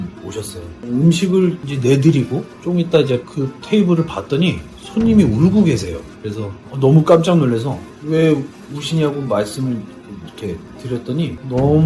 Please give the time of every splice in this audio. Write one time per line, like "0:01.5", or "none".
none